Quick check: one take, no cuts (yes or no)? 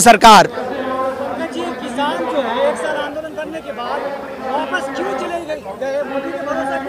yes